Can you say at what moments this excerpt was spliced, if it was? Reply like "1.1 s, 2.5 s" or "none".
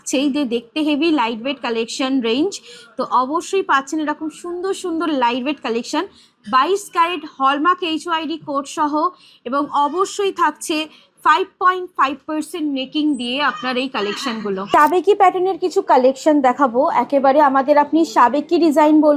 none